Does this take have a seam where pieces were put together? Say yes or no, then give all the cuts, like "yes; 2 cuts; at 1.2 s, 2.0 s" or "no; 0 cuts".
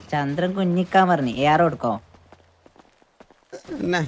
no; 0 cuts